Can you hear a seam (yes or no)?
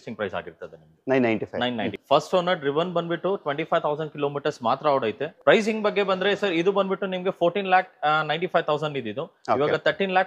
yes